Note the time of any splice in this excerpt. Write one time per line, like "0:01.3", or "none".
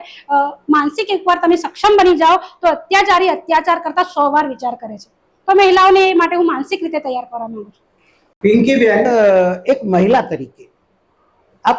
none